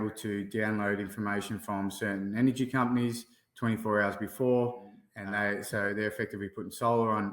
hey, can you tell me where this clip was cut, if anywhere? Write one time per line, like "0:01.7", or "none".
0:05.1